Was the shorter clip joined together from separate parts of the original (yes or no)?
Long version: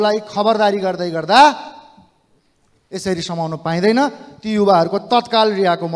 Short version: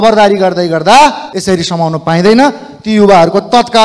yes